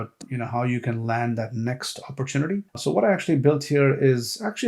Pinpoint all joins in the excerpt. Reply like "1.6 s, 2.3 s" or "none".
2.7 s